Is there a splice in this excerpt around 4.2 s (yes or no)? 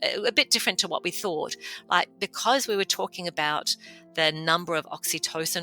no